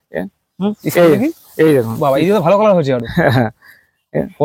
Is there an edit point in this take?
no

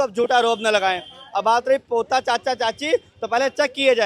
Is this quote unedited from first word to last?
yes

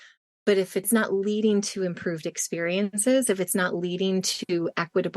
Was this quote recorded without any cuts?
no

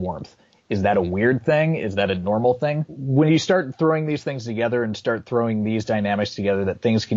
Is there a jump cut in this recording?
yes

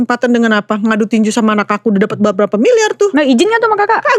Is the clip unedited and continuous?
yes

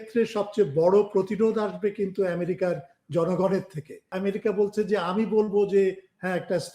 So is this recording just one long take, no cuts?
no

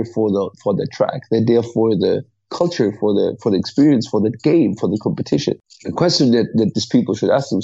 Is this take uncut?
no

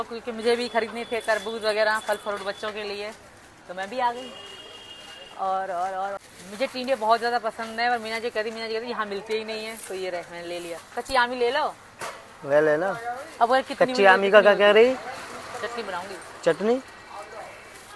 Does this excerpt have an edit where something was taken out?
no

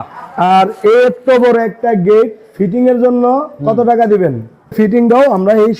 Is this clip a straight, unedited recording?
no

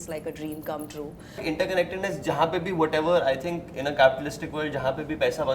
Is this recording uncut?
no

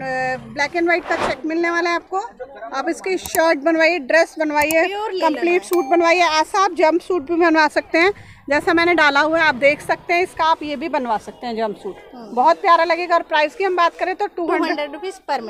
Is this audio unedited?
yes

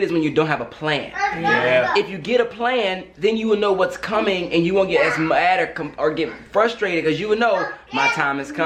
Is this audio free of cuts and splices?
yes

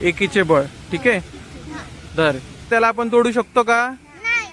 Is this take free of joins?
no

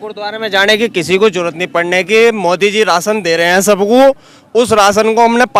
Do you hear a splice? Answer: no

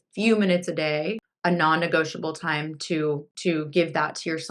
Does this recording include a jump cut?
yes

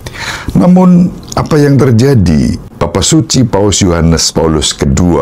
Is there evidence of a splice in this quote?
yes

